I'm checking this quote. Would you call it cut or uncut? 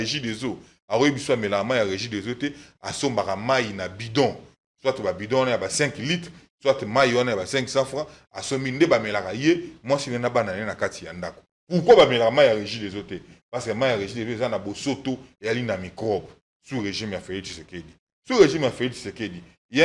uncut